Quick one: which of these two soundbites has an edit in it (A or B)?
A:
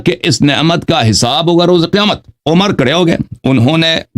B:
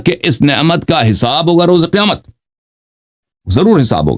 A